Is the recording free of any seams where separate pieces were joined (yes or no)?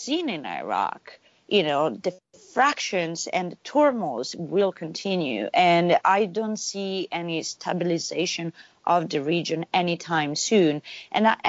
yes